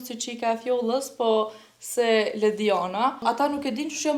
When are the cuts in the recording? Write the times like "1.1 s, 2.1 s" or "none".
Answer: 3.2 s